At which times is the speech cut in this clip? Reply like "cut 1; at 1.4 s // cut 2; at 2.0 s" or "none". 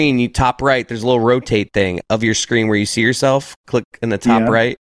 none